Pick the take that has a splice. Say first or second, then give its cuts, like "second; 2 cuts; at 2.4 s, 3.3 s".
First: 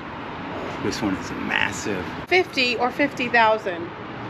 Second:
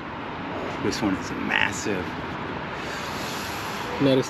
first; 1 cut; at 2.2 s